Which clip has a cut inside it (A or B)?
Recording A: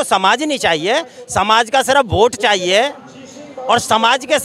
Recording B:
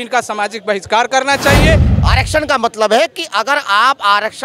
B